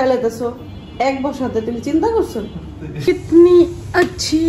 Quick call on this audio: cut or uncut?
cut